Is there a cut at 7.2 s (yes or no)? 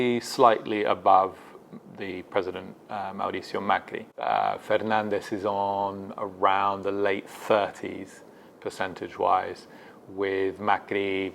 no